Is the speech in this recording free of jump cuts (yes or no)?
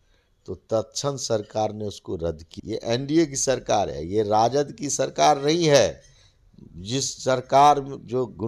no